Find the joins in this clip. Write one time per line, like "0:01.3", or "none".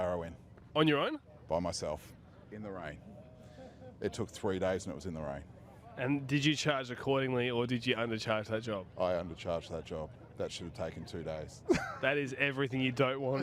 none